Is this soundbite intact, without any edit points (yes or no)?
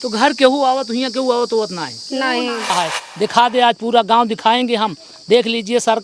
no